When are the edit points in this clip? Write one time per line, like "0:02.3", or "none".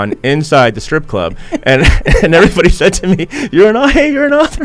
none